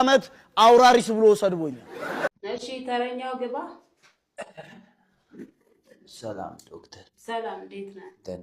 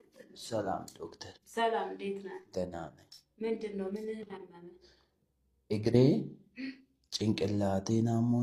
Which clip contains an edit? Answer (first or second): first